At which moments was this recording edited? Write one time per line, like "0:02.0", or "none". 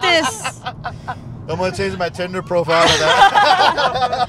none